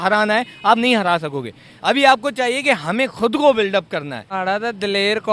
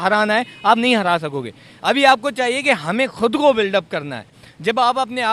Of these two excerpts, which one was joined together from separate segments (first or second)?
first